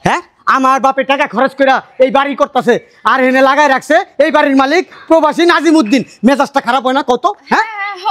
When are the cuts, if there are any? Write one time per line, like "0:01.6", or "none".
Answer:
none